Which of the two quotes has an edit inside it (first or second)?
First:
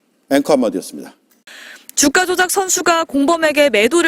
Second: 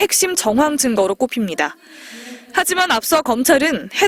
first